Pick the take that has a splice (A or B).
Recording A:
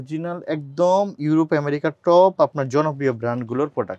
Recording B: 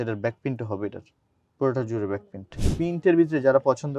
B